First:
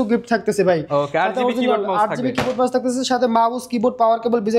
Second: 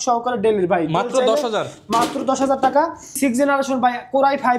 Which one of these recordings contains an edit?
second; 1 cut; at 3.2 s

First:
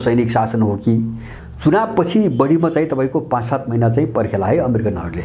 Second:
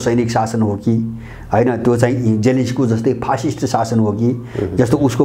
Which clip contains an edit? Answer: first; 1 cut; at 1.3 s

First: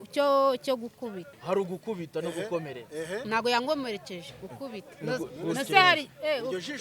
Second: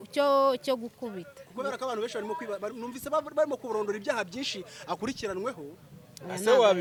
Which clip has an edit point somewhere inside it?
first; 1 cut; at 1.3 s

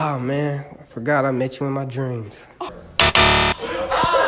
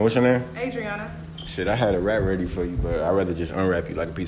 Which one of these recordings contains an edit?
first; 1 cut; at 2.7 s

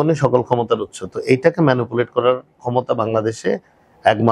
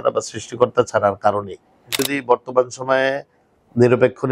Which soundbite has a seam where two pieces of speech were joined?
second; 1 cut; at 2.0 s

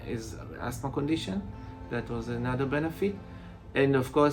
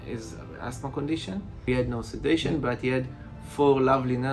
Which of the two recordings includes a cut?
second; 1 cut; at 1.7 s

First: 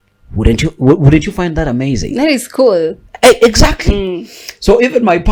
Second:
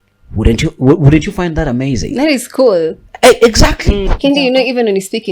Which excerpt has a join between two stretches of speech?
second; 1 cut; at 4.1 s

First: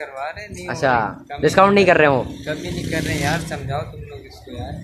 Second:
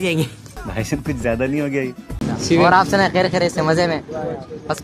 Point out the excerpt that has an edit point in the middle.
second; 1 cut; at 2.1 s

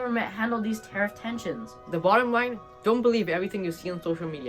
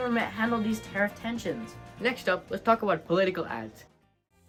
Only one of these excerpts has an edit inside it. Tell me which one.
first; 1 cut; at 1.7 s

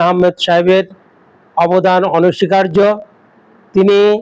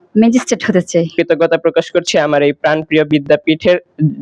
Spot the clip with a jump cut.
second; 1 cut; at 1.1 s

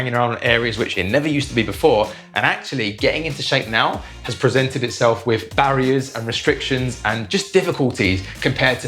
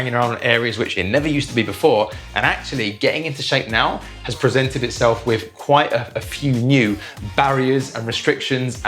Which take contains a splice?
first; 1 cut; at 5.5 s

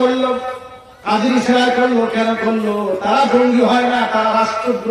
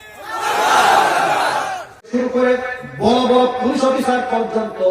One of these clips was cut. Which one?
second; 1 cut; at 2.1 s

